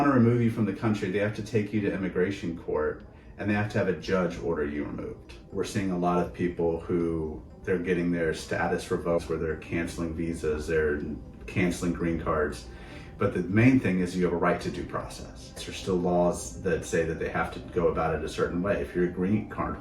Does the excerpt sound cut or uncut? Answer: cut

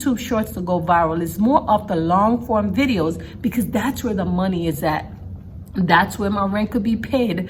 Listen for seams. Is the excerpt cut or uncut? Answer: uncut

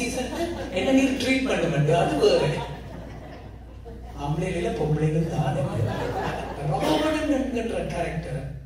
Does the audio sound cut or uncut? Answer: cut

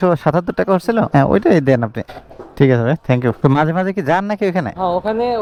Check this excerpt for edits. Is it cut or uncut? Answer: uncut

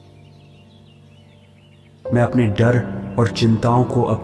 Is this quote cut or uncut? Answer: cut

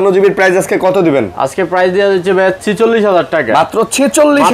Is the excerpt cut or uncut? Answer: uncut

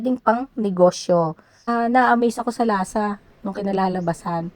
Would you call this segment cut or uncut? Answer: cut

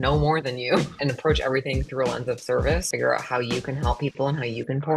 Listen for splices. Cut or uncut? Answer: cut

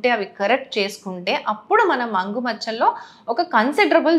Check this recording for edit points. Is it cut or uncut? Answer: uncut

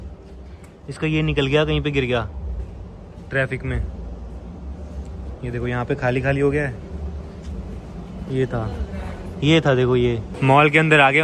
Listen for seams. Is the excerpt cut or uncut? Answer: uncut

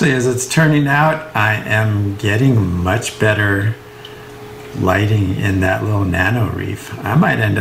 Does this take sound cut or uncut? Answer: uncut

